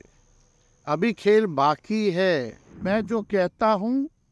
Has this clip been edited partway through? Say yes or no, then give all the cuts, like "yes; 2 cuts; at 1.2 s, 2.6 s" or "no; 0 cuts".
yes; 1 cut; at 2.8 s